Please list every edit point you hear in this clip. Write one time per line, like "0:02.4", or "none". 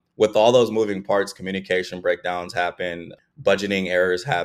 0:03.1

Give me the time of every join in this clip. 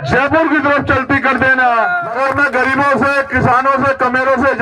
0:02.1

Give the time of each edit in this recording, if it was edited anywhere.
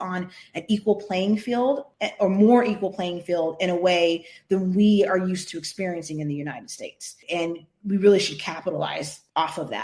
none

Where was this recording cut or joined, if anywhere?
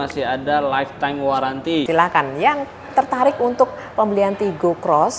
0:01.9

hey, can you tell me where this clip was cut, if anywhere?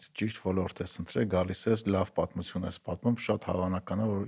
none

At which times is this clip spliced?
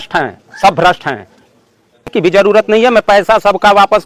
0:02.1

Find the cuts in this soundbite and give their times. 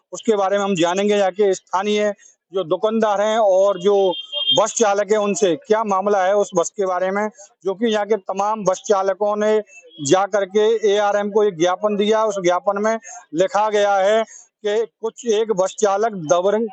none

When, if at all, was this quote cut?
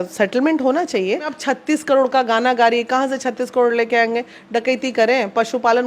0:01.3

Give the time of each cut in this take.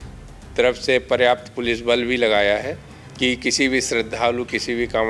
none

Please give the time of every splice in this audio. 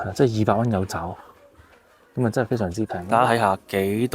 0:02.9

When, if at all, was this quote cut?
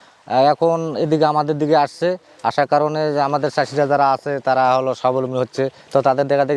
none

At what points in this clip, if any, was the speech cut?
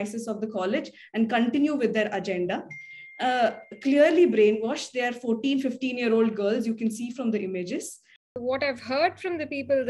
0:08.2

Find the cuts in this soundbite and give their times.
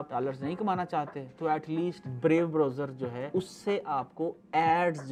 none

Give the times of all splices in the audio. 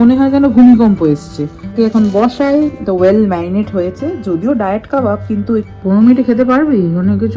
0:01.7
0:05.7

